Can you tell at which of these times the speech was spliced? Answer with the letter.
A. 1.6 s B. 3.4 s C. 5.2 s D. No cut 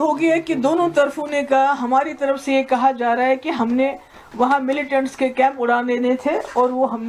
D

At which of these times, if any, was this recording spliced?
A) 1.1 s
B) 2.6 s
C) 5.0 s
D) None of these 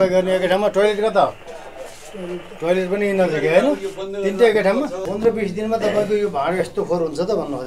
C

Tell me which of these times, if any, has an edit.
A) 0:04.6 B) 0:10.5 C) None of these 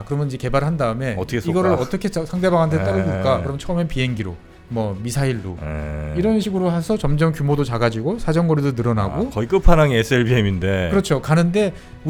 C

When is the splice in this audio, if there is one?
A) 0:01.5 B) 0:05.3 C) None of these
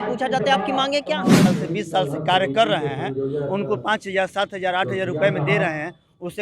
A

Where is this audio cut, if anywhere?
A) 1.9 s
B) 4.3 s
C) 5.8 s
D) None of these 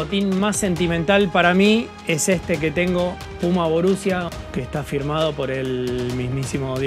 B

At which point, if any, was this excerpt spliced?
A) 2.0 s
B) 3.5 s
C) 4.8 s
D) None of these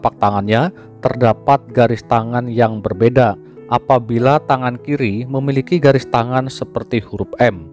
B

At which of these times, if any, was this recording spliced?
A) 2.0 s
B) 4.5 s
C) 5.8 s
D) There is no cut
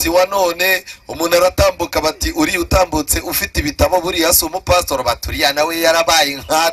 D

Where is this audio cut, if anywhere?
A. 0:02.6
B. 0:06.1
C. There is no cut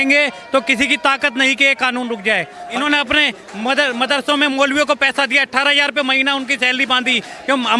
A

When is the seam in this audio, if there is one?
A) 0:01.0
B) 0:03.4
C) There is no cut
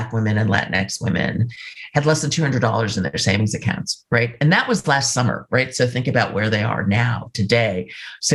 C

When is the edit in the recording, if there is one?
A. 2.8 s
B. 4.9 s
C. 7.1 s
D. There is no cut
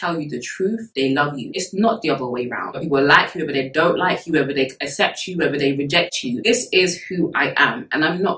A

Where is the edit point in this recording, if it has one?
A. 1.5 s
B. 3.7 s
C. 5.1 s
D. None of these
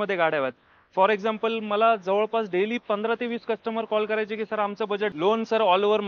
C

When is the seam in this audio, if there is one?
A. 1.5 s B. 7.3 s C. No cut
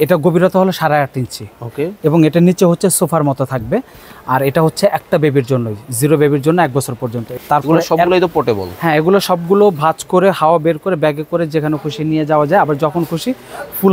B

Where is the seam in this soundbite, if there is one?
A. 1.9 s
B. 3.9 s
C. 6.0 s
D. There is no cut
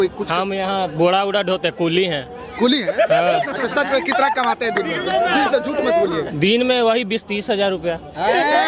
D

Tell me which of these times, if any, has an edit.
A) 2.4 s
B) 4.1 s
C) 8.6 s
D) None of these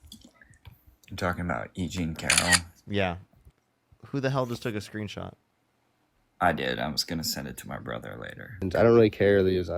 C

